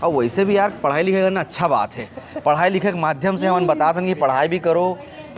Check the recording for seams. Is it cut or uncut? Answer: uncut